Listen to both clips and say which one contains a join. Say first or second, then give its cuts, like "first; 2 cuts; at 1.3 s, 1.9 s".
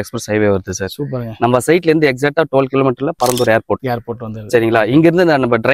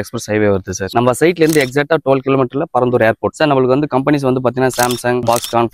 second; 2 cuts; at 0.8 s, 3.3 s